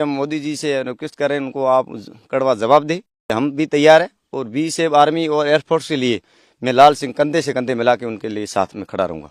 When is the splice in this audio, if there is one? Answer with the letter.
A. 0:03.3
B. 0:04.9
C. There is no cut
A